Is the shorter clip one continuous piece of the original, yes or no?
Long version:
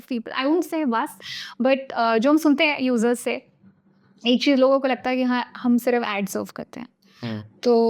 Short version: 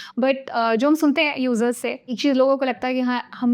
no